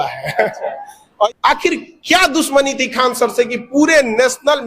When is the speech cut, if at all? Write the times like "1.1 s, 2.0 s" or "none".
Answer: 1.3 s